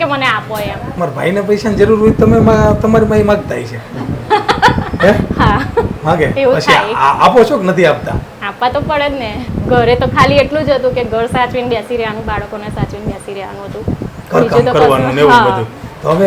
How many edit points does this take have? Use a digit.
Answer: 2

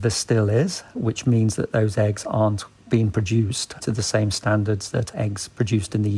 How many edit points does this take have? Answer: 1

